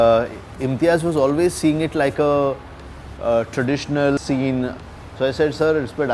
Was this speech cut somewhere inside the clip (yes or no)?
yes